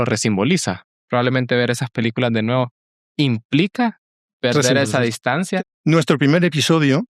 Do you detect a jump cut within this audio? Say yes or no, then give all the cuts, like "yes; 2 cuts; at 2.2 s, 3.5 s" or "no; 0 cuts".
yes; 2 cuts; at 0.9 s, 5.6 s